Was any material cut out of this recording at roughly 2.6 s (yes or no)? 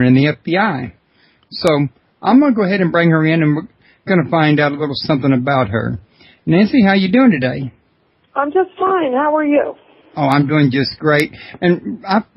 no